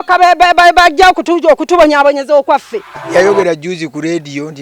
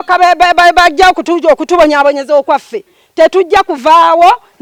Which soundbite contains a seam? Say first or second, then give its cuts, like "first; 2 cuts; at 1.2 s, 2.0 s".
first; 1 cut; at 3.0 s